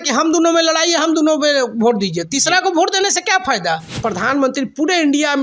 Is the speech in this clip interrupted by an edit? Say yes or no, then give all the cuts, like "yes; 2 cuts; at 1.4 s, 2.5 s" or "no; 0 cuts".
yes; 1 cut; at 4.0 s